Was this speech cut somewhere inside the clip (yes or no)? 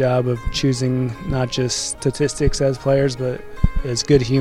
no